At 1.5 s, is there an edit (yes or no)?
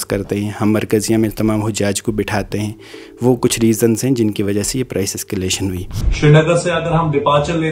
no